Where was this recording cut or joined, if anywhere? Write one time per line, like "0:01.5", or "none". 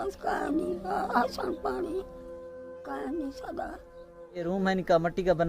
0:04.4